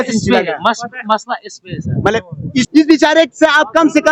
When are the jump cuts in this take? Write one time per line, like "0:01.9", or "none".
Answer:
0:02.7